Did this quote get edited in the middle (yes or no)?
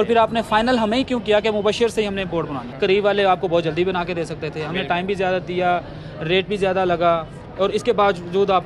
yes